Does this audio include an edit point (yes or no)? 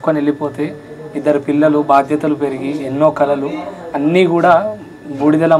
no